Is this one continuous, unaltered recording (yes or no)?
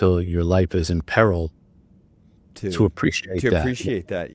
yes